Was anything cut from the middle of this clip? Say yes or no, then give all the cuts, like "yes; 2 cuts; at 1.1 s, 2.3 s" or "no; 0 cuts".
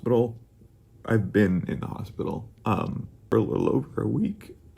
yes; 1 cut; at 3.3 s